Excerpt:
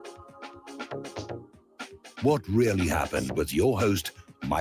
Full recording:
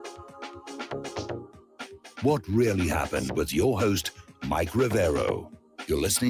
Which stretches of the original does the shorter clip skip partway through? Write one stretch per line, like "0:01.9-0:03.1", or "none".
none